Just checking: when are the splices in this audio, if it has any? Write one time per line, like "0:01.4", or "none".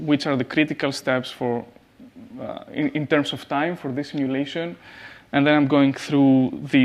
none